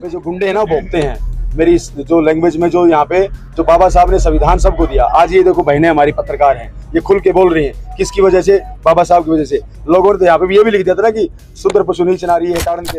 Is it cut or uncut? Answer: uncut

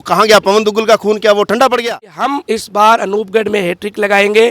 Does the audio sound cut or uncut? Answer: cut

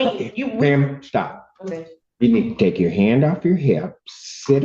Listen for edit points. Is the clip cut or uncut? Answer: cut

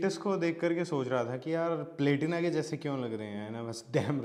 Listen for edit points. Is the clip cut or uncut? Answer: uncut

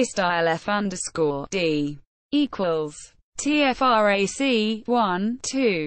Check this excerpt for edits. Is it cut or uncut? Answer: uncut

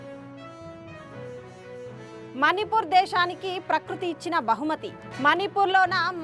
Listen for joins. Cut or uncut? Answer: uncut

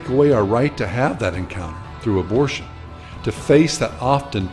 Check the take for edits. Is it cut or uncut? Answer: cut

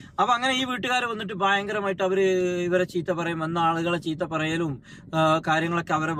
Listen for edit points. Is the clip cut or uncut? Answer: uncut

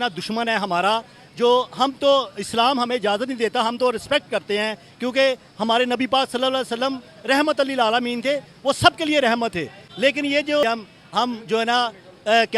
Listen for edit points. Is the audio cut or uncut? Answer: cut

